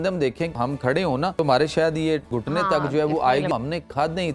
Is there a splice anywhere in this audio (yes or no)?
yes